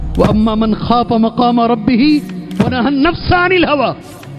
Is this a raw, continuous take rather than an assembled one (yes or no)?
yes